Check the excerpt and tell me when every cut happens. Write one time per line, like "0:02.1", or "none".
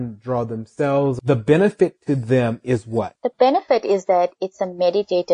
0:01.2
0:03.1